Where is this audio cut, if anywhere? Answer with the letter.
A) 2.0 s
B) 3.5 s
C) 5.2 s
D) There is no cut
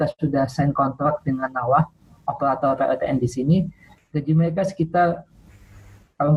D